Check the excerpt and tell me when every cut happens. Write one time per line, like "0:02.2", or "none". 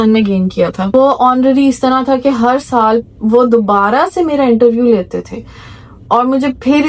0:00.9